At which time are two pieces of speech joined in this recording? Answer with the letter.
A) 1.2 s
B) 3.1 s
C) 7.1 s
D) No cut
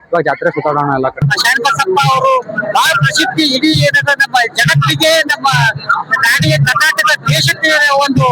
A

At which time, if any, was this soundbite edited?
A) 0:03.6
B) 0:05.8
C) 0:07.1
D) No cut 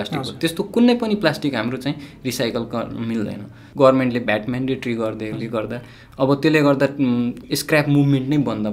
A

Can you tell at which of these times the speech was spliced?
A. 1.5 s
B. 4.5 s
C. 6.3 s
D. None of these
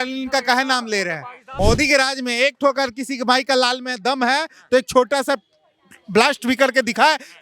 A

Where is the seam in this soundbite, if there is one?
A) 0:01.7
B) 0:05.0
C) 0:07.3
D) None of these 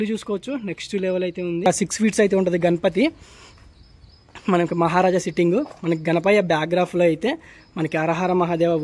A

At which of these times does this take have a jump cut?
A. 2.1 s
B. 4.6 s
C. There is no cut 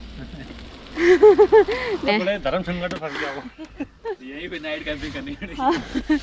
A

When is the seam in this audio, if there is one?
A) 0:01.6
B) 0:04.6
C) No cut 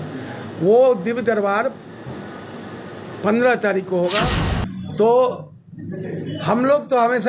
B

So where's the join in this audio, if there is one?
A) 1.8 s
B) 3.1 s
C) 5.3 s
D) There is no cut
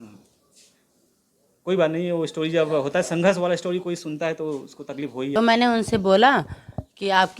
C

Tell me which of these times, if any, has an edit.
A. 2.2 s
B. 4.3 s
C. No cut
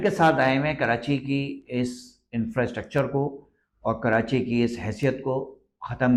C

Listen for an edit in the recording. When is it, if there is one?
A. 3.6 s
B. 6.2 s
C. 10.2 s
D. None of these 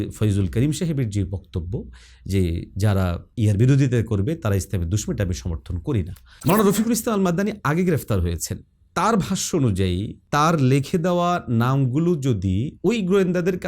B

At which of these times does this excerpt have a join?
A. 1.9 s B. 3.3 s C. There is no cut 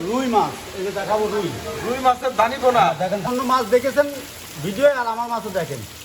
B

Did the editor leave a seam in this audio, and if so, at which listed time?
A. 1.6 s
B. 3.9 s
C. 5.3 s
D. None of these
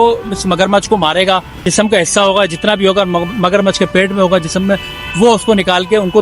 A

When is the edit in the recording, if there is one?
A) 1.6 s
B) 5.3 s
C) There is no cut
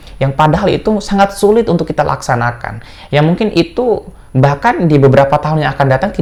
C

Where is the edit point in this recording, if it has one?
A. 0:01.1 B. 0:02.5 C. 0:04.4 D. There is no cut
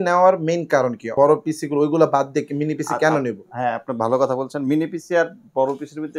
A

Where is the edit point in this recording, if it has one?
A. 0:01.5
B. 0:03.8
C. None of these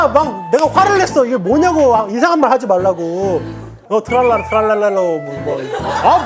B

